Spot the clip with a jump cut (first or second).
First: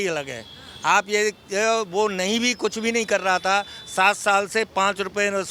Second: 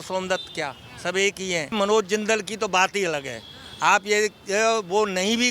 second